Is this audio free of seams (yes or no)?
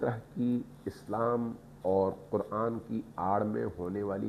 yes